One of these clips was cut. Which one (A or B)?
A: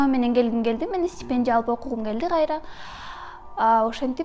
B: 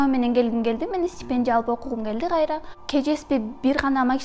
B